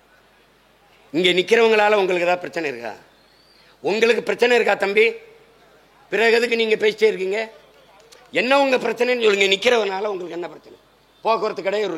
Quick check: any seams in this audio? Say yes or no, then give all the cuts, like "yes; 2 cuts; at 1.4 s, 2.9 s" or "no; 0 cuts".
no; 0 cuts